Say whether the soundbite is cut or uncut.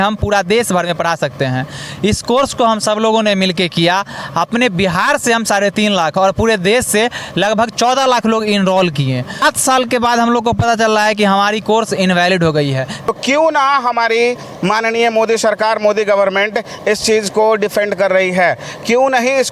cut